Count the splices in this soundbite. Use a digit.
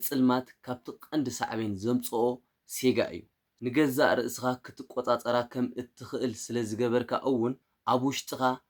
1